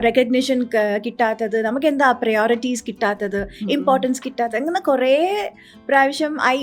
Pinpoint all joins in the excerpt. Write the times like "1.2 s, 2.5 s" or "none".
none